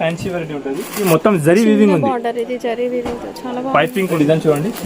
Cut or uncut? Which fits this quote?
cut